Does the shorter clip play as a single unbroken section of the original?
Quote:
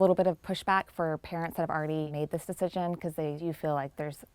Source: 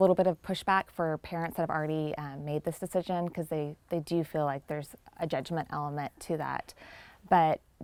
no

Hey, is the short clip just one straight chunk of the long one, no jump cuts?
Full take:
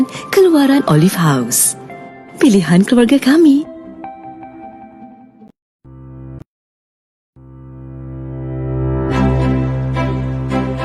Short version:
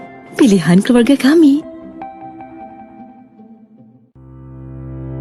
no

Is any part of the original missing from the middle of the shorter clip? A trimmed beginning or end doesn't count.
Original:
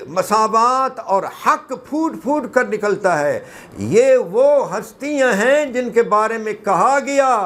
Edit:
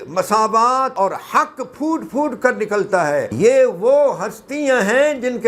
yes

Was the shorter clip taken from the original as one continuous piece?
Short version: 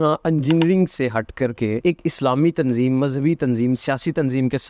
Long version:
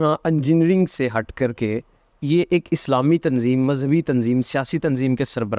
no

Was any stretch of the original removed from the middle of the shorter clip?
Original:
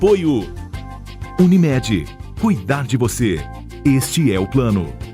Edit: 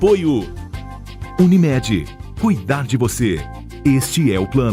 no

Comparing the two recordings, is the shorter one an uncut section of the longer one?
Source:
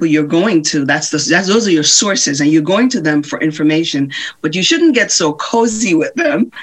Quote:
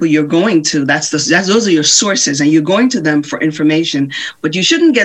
yes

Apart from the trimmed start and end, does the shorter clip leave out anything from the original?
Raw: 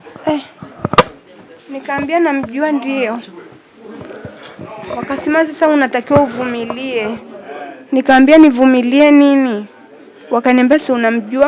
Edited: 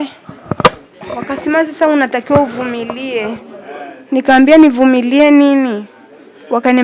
yes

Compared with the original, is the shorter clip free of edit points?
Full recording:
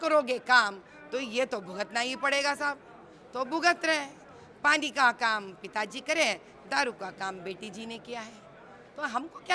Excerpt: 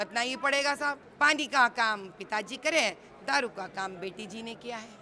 no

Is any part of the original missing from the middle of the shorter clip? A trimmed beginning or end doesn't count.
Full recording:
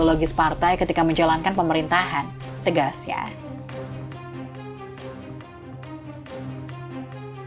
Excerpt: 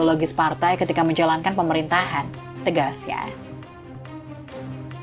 yes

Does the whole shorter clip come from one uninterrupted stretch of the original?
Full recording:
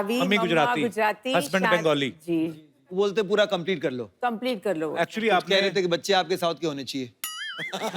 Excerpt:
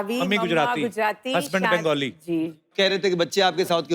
no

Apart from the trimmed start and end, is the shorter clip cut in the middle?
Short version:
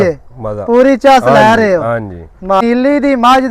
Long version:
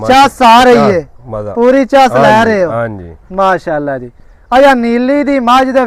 yes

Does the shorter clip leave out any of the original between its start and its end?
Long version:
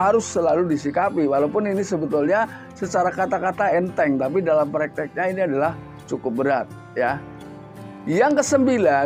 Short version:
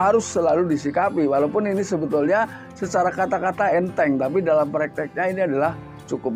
no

